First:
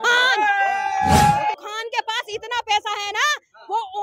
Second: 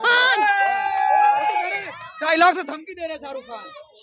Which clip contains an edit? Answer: first; 1 cut; at 1.5 s

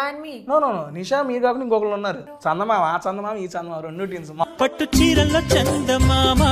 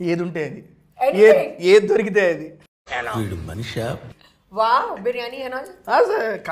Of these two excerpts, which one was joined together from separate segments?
first; 2 cuts; at 2.3 s, 4.4 s

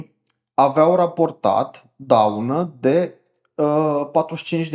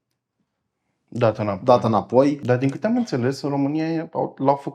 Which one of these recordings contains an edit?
second; 1 cut; at 2.4 s

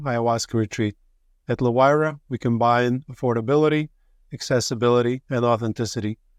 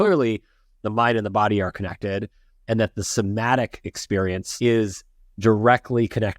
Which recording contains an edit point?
second; 1 cut; at 4.5 s

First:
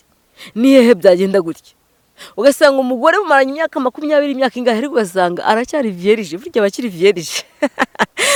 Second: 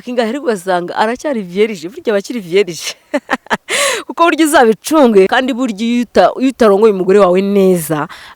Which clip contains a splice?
second; 1 cut; at 5.3 s

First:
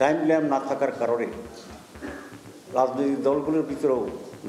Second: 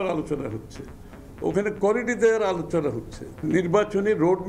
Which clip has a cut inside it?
second; 1 cut; at 3.4 s

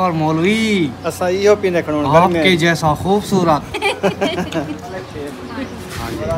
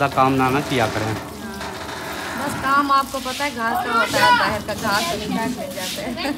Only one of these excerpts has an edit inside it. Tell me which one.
first; 1 cut; at 4.9 s

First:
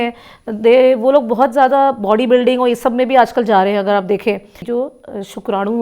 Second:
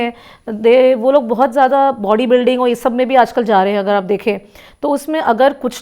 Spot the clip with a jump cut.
first; 1 cut; at 4.6 s

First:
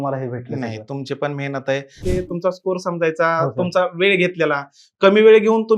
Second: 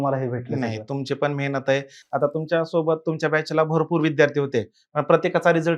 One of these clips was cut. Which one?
first; 1 cut; at 2.0 s

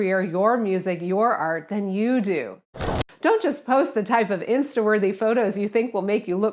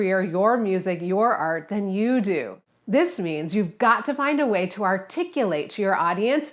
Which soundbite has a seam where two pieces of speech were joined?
first; 1 cut; at 2.8 s

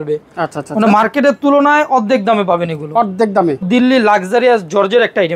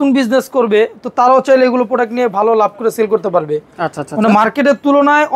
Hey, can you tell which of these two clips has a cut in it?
first; 1 cut; at 3.7 s

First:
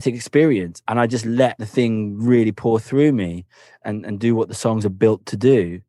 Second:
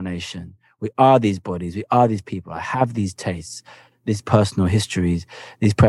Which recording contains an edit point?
first; 3 cuts; at 0.8 s, 1.6 s, 3.8 s

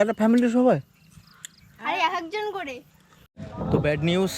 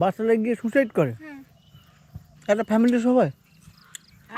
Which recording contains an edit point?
first; 1 cut; at 3.5 s

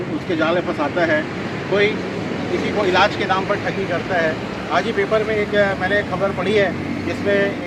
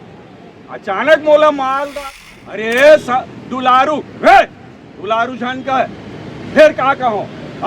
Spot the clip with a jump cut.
second; 1 cut; at 2.0 s

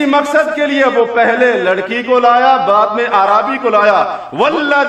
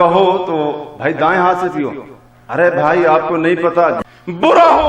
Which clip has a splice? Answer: second; 1 cut; at 4.0 s

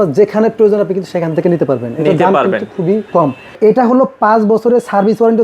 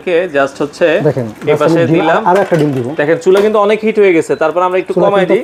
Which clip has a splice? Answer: first; 1 cut; at 3.3 s

